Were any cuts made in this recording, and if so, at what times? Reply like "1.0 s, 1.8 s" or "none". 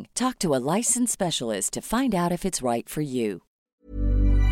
3.5 s